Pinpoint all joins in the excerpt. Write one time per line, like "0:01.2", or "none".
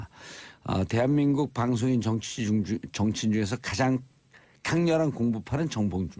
none